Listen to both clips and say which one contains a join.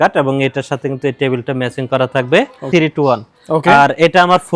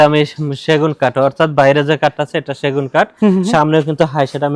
first; 1 cut; at 2.7 s

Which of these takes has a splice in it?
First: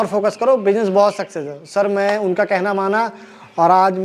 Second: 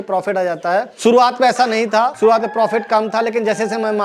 second; 2 cuts; at 0.9 s, 2.1 s

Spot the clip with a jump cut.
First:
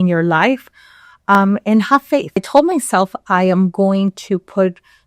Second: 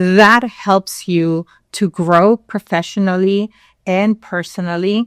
first; 1 cut; at 2.4 s

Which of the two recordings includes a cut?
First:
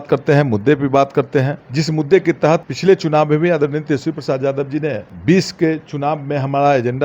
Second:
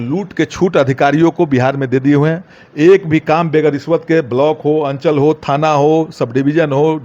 first; 3 cuts; at 1.6 s, 2.7 s, 5.1 s

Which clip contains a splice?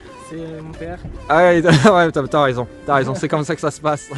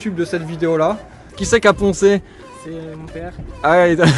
second; 1 cut; at 1.3 s

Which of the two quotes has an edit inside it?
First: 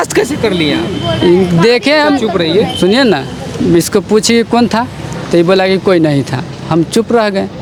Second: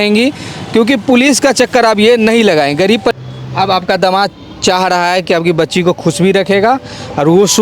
second; 1 cut; at 3.1 s

